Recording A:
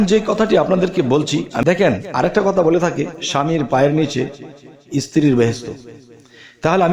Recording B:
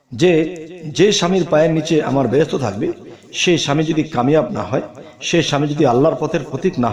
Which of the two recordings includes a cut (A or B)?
A